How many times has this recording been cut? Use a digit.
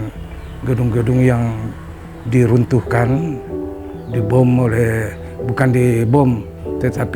0